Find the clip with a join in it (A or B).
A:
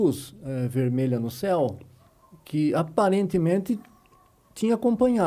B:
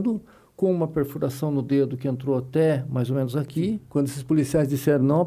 B